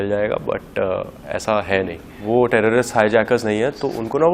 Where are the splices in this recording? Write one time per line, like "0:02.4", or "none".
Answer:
0:02.1

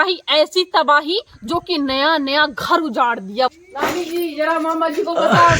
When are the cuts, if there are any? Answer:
0:03.6

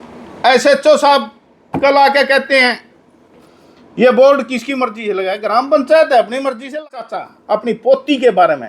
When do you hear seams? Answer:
0:06.9

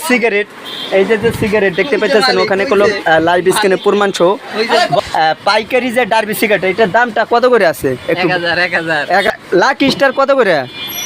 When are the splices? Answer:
0:05.0
0:09.3

